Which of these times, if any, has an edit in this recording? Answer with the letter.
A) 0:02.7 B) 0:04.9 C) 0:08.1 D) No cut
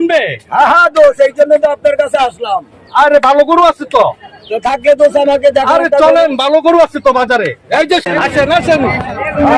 C